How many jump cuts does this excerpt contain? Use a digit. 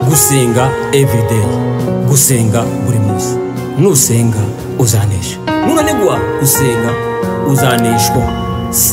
0